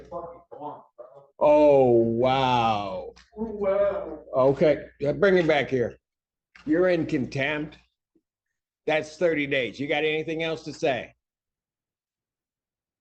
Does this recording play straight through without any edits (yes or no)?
yes